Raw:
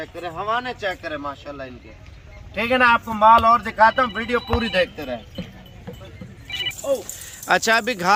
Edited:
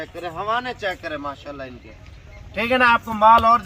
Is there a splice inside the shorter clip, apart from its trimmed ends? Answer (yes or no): no